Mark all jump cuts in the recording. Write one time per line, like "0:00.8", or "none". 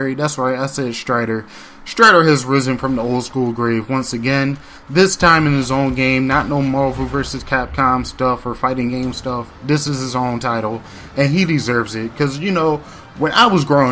none